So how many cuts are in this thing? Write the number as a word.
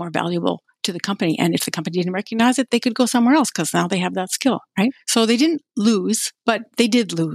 two